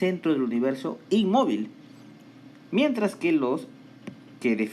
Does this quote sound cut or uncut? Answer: cut